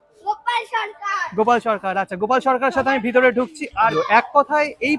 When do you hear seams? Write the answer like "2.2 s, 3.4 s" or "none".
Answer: 3.9 s